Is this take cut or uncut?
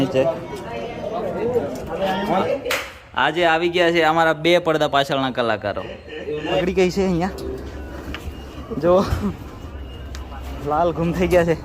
cut